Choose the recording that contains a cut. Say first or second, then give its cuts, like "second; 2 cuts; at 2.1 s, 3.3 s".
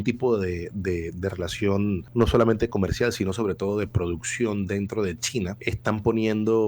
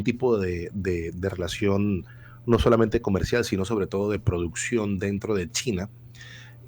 first; 2 cuts; at 2.0 s, 5.6 s